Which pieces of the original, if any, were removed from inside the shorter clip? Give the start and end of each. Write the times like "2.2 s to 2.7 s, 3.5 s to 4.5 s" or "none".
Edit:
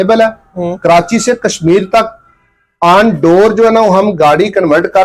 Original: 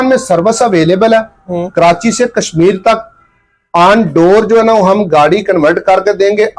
none